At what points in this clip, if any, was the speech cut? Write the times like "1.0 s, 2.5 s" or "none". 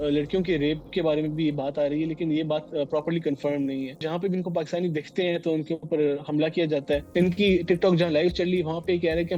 4.0 s, 7.1 s